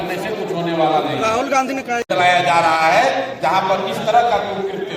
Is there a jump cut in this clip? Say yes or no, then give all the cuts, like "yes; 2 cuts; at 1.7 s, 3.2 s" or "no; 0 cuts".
yes; 1 cut; at 2.1 s